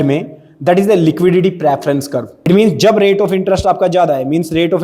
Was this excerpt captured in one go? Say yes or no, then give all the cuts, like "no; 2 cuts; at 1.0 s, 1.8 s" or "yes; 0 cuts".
no; 1 cut; at 2.3 s